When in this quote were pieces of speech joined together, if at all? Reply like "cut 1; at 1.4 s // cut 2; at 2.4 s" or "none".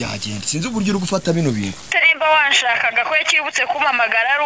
cut 1; at 1.9 s